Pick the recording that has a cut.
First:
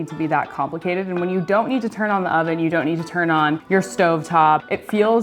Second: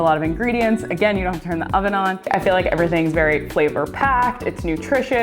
second; 1 cut; at 2.2 s

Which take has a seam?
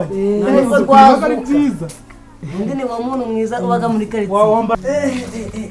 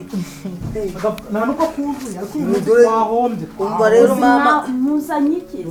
first; 1 cut; at 4.8 s

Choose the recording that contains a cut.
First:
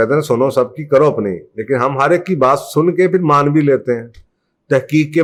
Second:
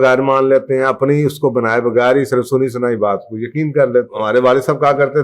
second; 1 cut; at 4.1 s

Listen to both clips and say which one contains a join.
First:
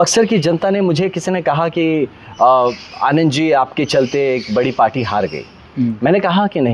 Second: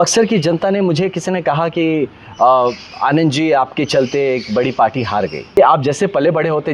second; 1 cut; at 5.4 s

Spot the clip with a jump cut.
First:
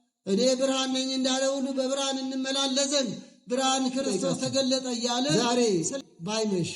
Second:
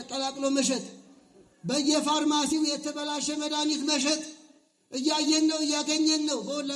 first; 1 cut; at 5.3 s

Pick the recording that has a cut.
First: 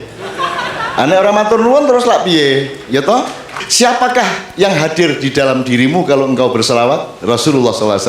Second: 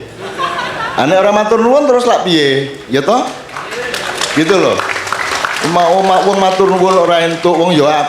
first; 2 cuts; at 3.7 s, 7.1 s

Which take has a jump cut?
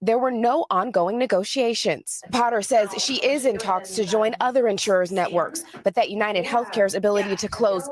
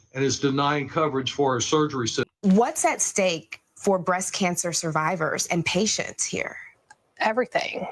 second; 1 cut; at 2.3 s

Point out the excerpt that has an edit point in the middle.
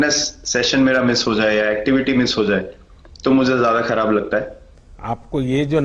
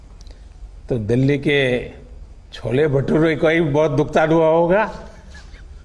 first; 1 cut; at 4.8 s

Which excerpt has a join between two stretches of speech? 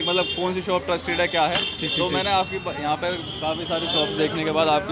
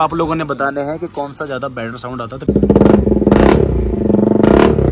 second; 1 cut; at 2.5 s

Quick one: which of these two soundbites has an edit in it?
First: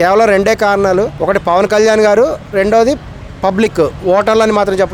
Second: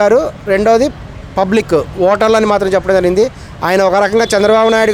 first; 1 cut; at 1.1 s

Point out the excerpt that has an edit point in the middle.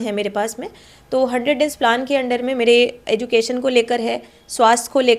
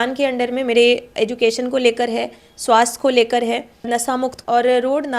second; 1 cut; at 4.2 s

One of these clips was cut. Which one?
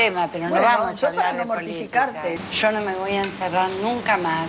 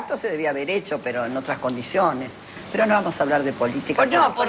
first; 1 cut; at 2.4 s

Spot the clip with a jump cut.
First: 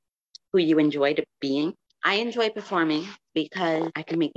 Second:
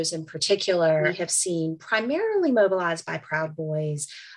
second; 1 cut; at 1.1 s

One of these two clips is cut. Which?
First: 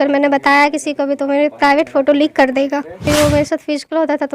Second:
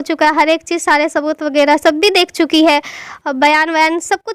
first; 1 cut; at 3.0 s

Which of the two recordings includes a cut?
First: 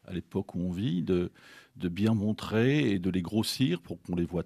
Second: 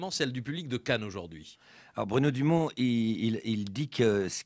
first; 1 cut; at 1.5 s

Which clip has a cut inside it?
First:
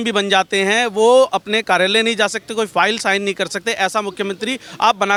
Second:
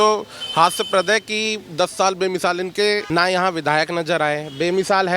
second; 1 cut; at 3.0 s

